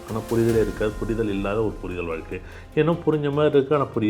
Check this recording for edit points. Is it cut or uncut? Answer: uncut